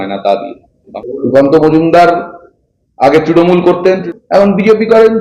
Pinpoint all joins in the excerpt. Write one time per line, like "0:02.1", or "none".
0:00.9
0:04.1

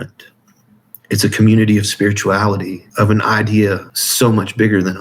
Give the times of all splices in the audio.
0:02.8
0:04.0

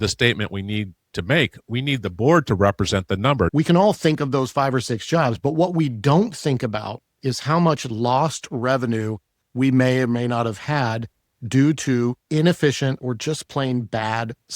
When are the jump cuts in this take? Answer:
0:03.5
0:13.0

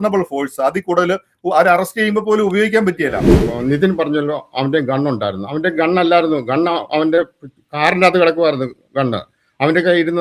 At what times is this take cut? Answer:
0:03.4

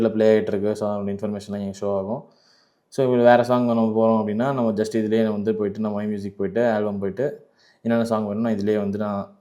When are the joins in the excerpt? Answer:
none

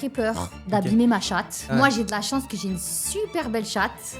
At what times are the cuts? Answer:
0:01.7

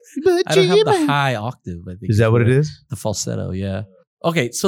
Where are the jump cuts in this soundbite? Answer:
0:03.8

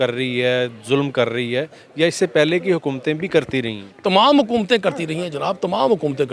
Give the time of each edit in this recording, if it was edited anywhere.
none

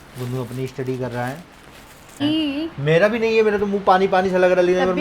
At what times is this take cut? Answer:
0:02.2

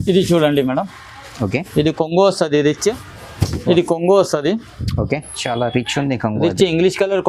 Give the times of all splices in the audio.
0:02.9

